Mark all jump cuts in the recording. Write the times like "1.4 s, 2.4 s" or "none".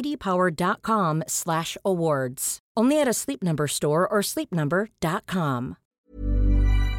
5.9 s